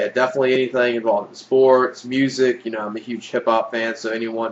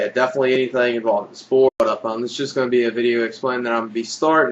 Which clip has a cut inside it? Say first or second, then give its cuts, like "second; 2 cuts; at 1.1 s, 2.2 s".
first; 1 cut; at 1.7 s